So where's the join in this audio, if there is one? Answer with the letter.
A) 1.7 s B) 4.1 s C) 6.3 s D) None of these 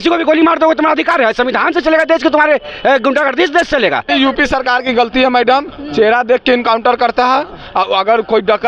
B